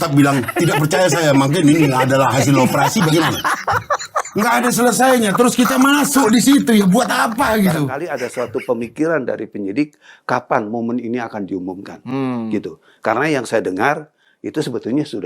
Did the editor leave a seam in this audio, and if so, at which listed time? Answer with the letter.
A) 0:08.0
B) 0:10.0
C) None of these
A